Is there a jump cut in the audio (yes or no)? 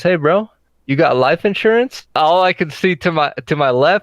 yes